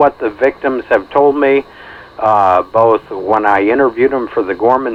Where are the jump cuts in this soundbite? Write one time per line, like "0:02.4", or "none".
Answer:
none